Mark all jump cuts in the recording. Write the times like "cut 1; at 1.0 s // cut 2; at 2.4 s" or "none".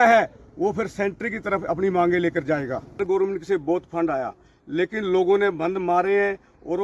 cut 1; at 2.9 s